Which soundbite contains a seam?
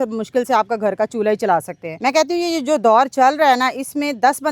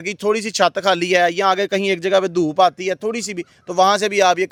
first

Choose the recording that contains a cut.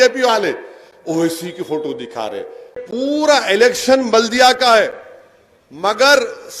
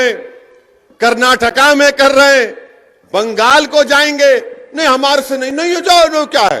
first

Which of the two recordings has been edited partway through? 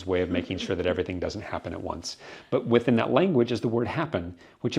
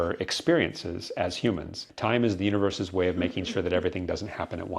second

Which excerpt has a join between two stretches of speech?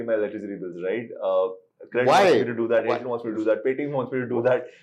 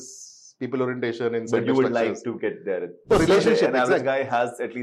second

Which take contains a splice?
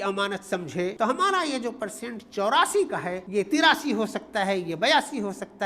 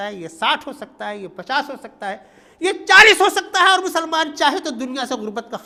first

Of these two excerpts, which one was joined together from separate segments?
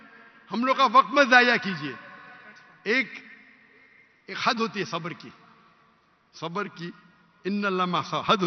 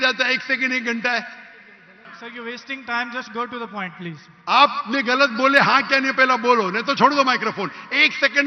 second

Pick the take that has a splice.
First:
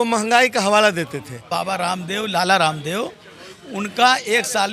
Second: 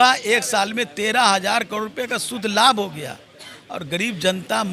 first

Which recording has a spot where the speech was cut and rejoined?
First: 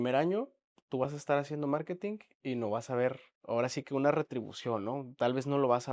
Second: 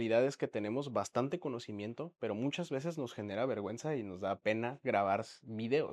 first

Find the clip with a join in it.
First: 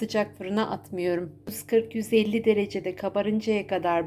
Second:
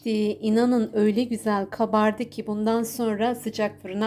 first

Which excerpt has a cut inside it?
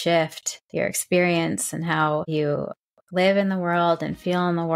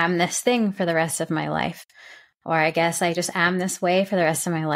first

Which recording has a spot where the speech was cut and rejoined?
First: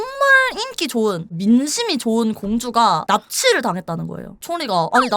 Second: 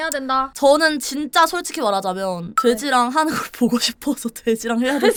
first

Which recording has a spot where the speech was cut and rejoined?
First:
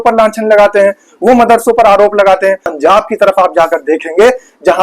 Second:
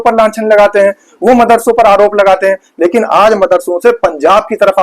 first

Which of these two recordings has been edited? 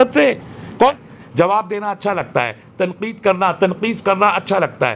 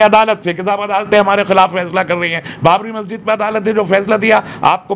first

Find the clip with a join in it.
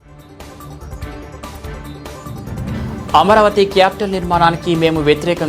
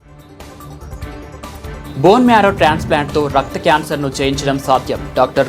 first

